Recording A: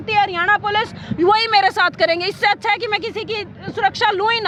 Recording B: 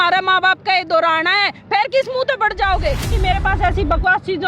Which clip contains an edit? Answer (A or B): B